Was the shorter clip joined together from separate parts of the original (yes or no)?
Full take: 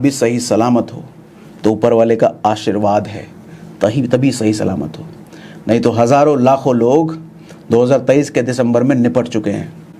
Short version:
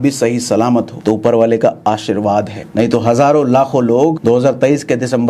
yes